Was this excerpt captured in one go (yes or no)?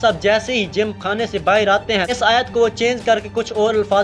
no